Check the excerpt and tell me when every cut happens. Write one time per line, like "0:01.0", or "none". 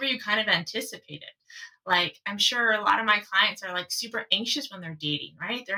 none